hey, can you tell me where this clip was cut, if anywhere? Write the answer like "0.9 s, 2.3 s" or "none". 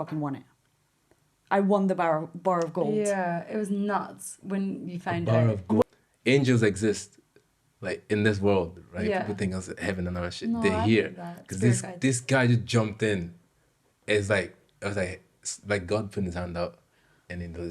5.8 s

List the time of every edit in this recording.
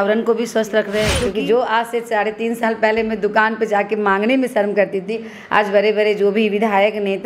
1.2 s

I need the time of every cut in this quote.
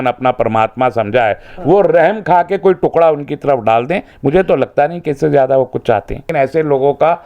6.2 s

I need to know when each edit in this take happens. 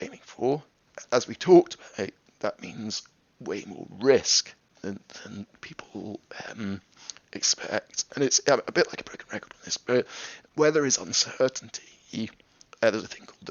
none

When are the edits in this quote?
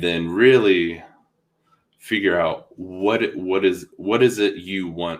none

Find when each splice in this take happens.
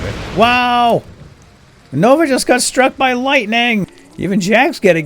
3.9 s

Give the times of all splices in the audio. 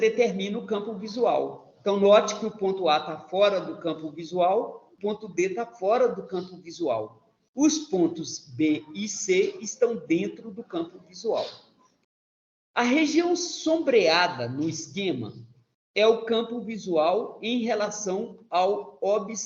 4.9 s

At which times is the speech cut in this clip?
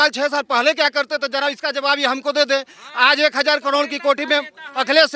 none

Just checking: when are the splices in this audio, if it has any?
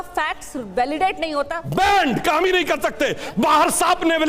1.6 s

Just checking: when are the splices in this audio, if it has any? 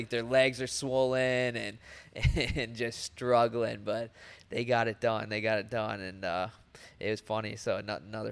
none

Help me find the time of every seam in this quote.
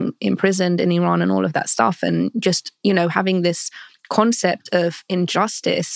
none

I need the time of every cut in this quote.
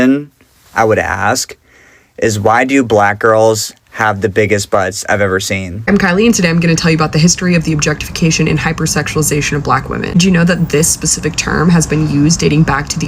5.9 s

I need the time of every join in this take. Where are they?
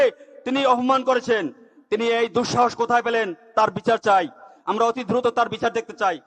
none

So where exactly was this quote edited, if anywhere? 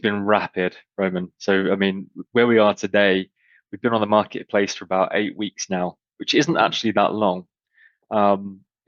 none

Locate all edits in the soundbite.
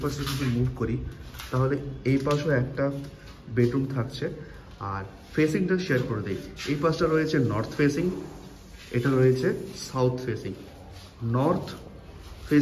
none

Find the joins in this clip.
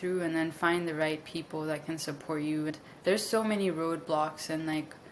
2.7 s

